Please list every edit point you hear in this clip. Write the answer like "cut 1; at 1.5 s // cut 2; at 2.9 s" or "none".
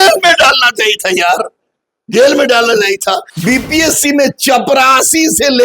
cut 1; at 3.3 s